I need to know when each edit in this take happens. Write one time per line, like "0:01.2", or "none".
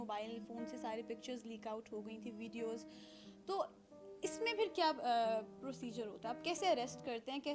none

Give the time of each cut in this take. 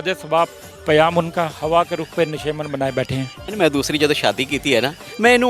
0:03.5

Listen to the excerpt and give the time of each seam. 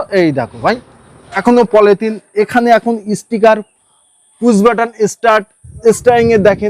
0:01.1

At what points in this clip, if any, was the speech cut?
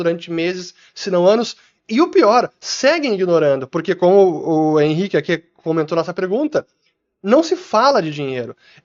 none

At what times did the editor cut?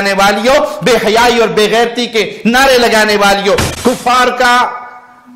0:03.7

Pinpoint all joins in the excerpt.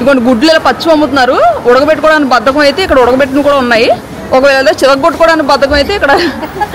none

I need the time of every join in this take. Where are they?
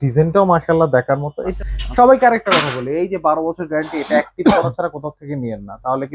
0:01.6

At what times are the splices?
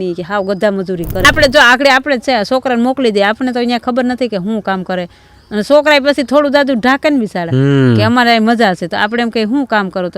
0:01.2

